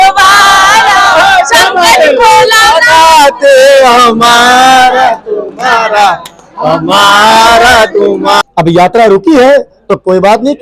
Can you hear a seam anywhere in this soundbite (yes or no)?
yes